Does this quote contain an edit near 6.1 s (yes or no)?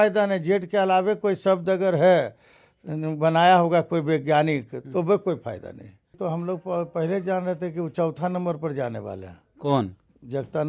yes